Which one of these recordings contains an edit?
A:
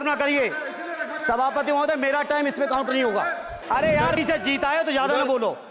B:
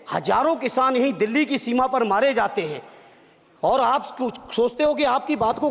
A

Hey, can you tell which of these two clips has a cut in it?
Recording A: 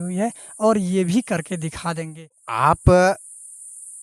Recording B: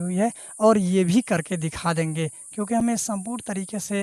A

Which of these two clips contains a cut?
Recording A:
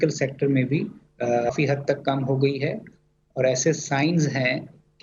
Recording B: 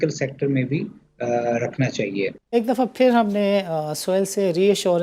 A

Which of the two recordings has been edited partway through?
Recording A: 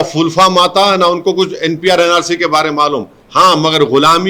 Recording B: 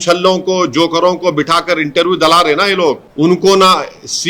B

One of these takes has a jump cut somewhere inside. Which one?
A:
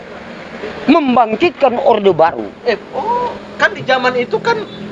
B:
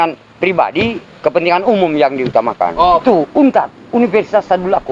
B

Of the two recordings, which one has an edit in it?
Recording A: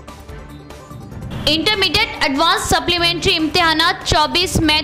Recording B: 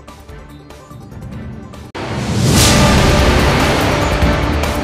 A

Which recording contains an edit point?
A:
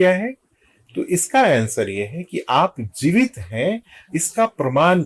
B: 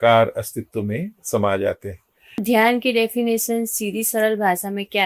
B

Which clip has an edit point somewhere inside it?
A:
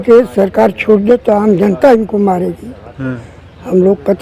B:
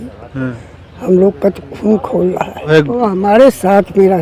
B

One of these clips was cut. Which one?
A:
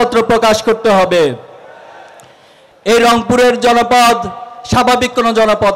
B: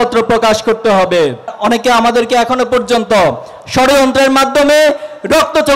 B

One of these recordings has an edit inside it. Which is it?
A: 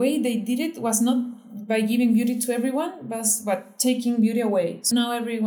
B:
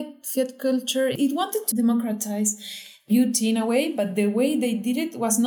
B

